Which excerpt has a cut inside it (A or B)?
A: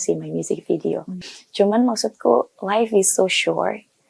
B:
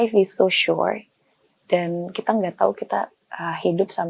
A